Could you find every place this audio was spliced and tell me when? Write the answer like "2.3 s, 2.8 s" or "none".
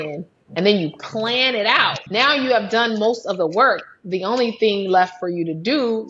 2.0 s